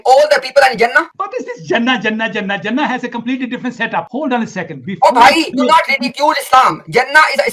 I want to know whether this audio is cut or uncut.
cut